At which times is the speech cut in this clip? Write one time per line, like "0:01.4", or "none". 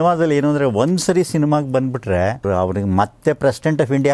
0:02.4